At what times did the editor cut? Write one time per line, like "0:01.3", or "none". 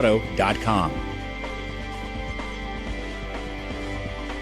0:00.9